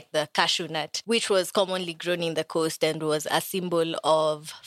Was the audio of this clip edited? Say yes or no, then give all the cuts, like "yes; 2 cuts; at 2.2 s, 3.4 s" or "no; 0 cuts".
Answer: yes; 1 cut; at 0.9 s